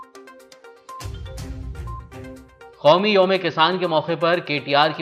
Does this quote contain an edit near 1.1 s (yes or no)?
yes